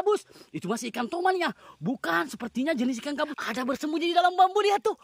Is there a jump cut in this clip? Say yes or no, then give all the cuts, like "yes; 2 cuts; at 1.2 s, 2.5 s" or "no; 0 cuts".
yes; 1 cut; at 3.4 s